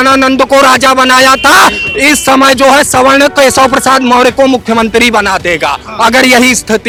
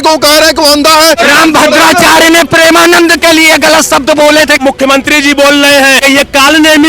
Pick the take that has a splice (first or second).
second